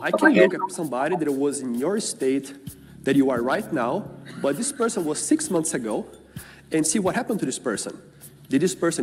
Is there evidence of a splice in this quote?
no; 0 cuts

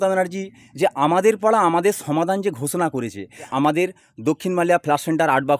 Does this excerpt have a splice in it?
yes; 1 cut; at 3.5 s

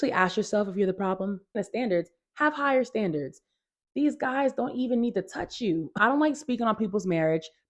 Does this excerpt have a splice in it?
yes; 2 cuts; at 1.5 s, 6.0 s

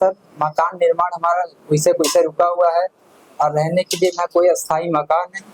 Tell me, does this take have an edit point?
no; 0 cuts

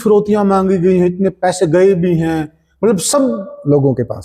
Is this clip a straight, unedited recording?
yes; 0 cuts

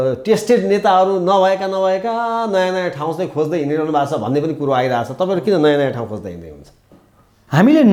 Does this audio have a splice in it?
no; 0 cuts

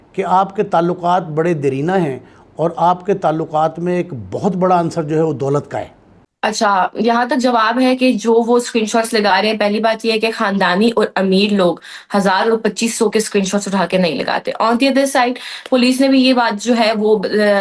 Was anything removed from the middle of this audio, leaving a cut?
no; 0 cuts

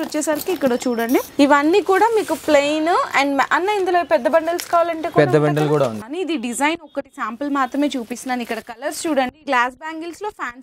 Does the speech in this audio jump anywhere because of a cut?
yes; 3 cuts; at 1.3 s, 6.0 s, 9.4 s

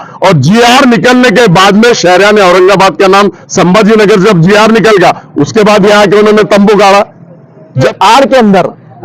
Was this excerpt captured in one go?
no; 1 cut; at 7.9 s

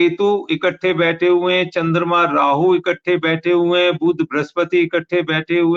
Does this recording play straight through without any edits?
yes; 0 cuts

